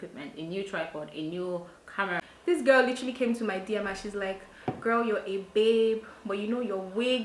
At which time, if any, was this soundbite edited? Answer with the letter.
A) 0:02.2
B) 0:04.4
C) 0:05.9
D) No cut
A